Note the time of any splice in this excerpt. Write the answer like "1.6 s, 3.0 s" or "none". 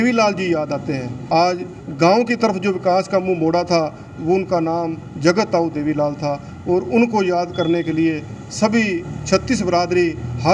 1.1 s